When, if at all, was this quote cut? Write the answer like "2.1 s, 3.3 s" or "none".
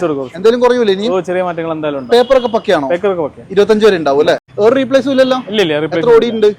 4.5 s